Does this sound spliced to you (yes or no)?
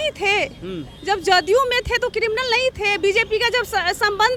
no